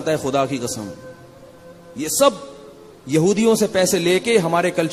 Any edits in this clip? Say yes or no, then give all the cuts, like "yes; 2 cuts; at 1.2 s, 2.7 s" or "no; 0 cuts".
no; 0 cuts